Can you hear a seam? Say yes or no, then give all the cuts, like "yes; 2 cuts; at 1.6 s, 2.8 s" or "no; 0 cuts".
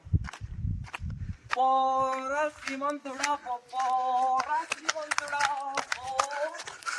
no; 0 cuts